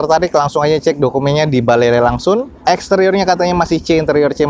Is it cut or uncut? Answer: uncut